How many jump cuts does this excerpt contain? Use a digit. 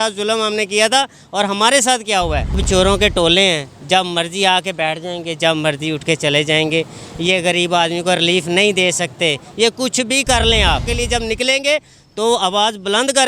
2